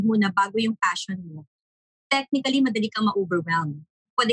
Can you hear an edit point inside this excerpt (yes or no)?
no